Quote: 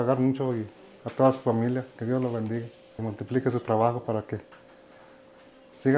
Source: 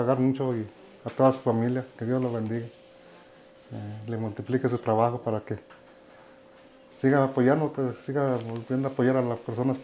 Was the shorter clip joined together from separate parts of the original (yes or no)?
yes